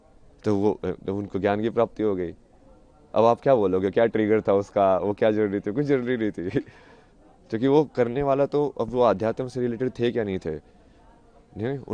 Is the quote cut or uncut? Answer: uncut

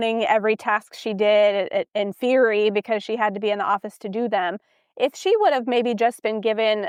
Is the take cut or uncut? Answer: uncut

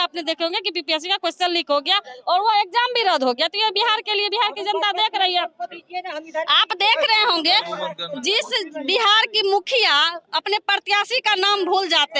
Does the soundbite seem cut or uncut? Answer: uncut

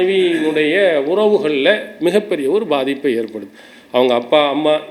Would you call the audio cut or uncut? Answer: uncut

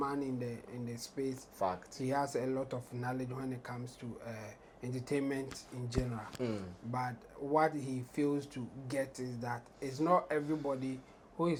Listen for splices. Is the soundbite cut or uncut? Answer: uncut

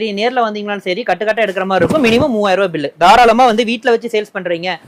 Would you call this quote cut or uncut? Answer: uncut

